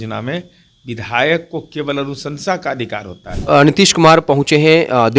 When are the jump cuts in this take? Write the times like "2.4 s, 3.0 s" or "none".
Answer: 3.4 s